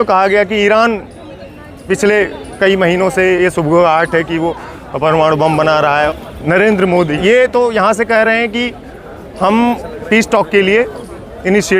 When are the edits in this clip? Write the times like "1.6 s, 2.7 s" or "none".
6.1 s, 7.1 s